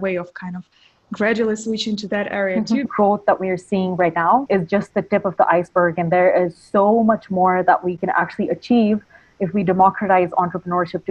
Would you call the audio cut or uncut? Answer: cut